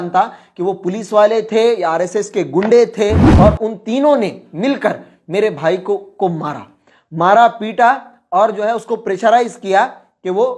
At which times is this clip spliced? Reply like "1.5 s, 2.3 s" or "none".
3.2 s